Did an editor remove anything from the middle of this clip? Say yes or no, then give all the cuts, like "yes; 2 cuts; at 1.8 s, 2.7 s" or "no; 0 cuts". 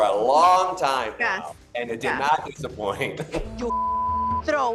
yes; 1 cut; at 3.5 s